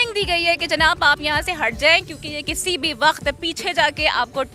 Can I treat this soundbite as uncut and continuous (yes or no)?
yes